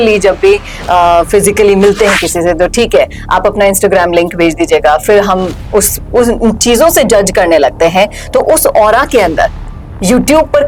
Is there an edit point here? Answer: no; 0 cuts

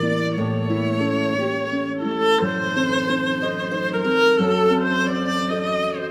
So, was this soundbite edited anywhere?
no; 0 cuts

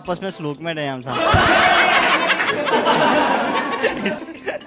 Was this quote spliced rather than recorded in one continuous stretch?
no; 0 cuts

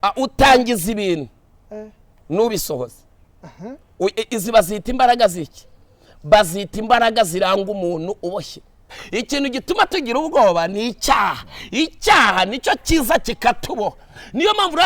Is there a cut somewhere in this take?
yes; 1 cut; at 8.9 s

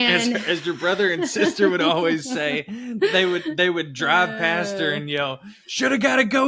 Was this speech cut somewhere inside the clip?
no; 0 cuts

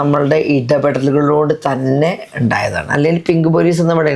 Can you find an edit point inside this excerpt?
no; 0 cuts

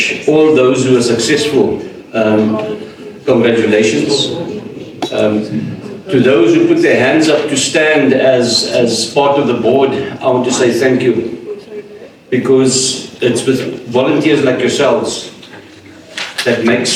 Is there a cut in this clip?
no; 0 cuts

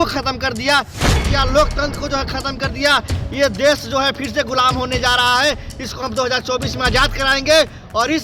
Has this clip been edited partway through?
yes; 1 cut; at 1.1 s

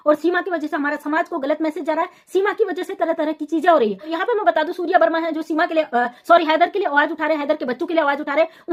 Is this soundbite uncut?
yes; 0 cuts

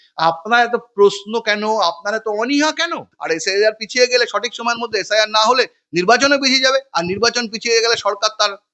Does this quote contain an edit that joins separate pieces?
yes; 1 cut; at 3.1 s

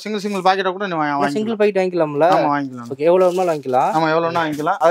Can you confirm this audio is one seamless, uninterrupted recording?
yes; 0 cuts

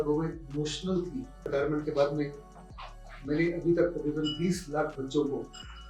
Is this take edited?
yes; 1 cut; at 1.5 s

